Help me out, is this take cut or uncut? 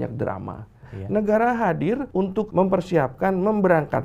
cut